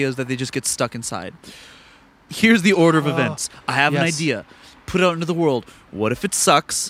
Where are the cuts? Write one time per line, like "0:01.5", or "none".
0:02.3